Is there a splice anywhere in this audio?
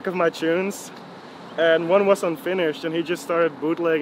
no; 0 cuts

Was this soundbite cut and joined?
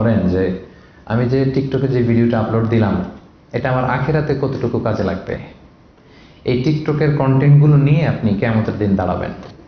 no; 0 cuts

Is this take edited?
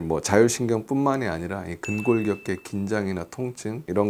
no; 0 cuts

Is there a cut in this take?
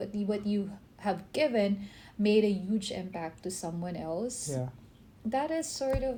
no; 0 cuts

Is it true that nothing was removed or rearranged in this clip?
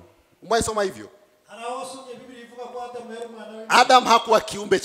yes; 0 cuts

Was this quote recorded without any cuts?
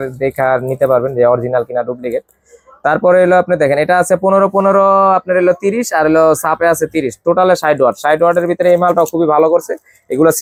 yes; 0 cuts

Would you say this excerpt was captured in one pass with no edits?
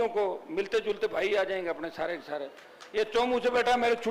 yes; 0 cuts

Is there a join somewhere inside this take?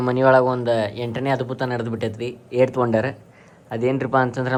no; 0 cuts

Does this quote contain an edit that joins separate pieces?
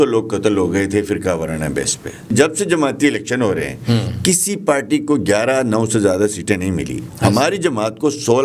yes; 1 cut; at 2.3 s

